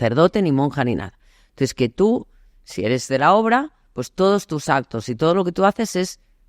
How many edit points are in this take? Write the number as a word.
zero